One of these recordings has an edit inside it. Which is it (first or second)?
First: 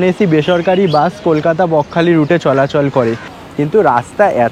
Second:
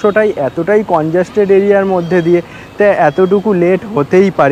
first